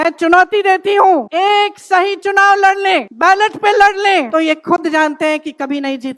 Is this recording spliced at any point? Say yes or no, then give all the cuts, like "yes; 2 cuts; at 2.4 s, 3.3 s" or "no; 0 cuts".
yes; 3 cuts; at 1.3 s, 3.1 s, 4.3 s